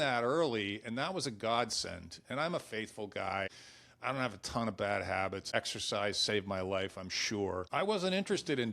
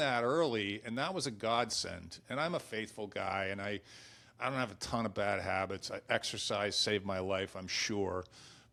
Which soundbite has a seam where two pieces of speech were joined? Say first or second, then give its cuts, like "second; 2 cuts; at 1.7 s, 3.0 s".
first; 3 cuts; at 3.5 s, 5.5 s, 7.7 s